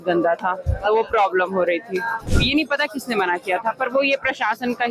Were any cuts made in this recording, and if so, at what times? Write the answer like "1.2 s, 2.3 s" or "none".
2.2 s